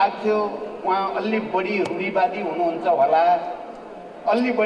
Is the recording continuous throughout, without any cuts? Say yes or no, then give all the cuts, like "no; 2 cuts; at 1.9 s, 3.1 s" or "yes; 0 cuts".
yes; 0 cuts